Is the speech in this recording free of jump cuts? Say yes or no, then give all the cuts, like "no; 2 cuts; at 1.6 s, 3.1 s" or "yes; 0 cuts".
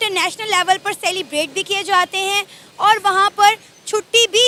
yes; 0 cuts